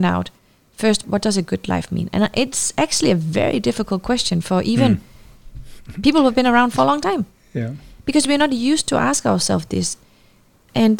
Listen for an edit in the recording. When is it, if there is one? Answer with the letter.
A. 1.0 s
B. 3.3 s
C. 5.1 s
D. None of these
A